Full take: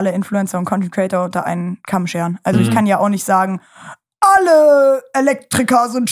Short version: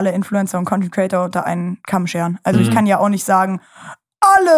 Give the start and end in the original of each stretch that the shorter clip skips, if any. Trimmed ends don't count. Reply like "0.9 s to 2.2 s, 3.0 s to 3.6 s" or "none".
none